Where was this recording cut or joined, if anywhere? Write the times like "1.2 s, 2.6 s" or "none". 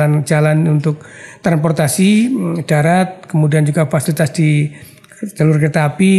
none